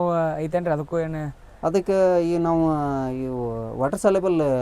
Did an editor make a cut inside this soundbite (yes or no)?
no